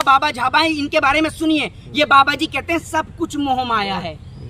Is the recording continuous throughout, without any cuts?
yes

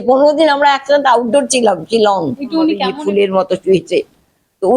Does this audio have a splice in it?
yes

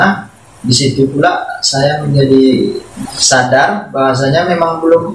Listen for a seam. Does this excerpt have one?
yes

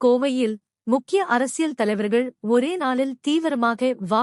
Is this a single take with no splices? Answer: yes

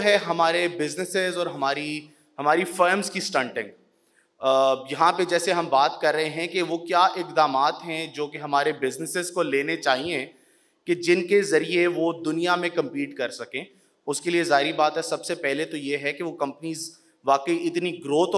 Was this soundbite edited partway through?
no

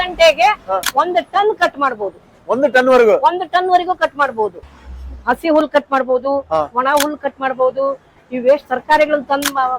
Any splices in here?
yes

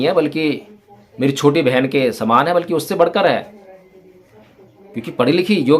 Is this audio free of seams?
yes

